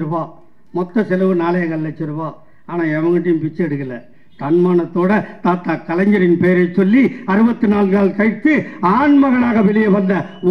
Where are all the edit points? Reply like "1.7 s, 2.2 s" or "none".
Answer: none